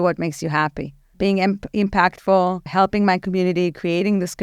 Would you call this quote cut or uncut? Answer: cut